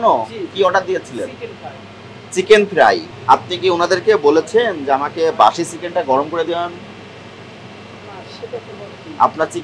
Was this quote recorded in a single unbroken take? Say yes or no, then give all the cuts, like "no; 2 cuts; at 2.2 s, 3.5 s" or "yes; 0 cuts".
no; 1 cut; at 3.1 s